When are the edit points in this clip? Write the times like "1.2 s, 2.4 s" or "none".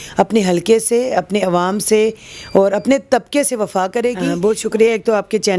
4.3 s